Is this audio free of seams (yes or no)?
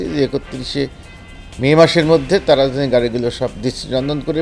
yes